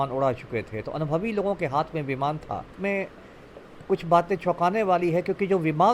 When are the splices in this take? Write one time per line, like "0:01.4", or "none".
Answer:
0:02.7